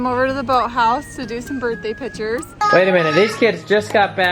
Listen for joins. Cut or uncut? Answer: cut